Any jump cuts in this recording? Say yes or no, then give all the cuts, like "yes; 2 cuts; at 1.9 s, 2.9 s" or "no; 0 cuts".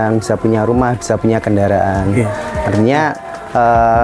no; 0 cuts